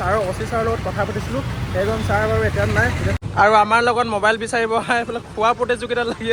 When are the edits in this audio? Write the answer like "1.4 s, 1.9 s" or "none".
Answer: 3.2 s